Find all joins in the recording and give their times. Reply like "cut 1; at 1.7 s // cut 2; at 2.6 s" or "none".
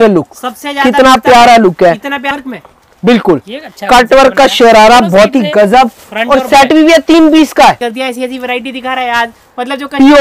cut 1; at 2.2 s // cut 2; at 7.9 s